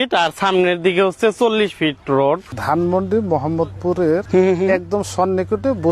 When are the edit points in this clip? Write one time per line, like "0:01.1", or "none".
0:02.5
0:04.2